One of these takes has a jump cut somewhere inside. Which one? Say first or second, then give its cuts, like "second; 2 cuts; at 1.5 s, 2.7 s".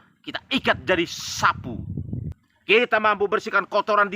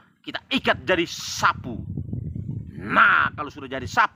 first; 1 cut; at 2.3 s